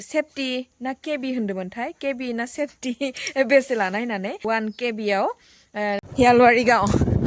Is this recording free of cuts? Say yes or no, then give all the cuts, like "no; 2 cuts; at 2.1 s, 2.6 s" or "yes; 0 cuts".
no; 2 cuts; at 4.4 s, 6.1 s